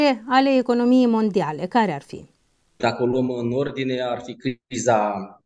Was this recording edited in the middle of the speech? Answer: yes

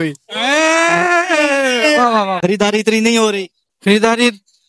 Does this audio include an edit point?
yes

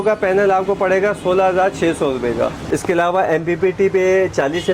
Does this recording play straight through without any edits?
no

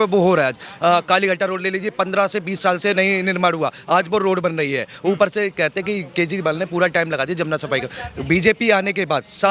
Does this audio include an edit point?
no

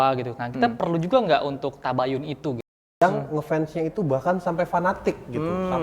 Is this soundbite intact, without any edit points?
no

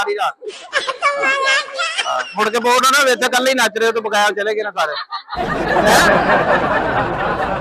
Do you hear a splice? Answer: no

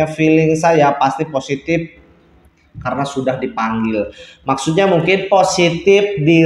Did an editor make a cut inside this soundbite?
no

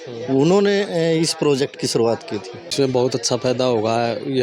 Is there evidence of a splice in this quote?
yes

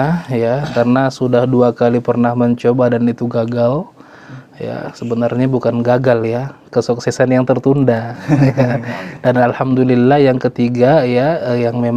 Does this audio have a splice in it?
no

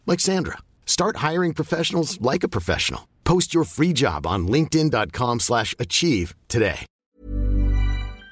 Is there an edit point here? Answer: yes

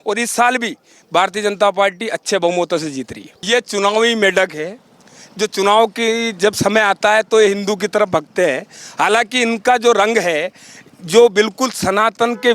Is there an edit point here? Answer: yes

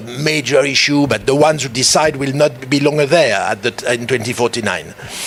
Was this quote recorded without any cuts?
yes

